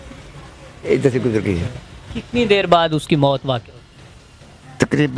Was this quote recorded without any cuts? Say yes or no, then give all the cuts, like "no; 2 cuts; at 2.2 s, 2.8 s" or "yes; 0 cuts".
yes; 0 cuts